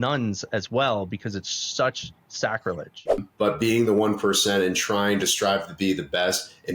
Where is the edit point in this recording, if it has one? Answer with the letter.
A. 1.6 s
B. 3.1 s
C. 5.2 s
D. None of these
B